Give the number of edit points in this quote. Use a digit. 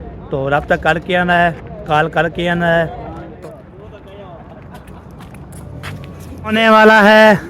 2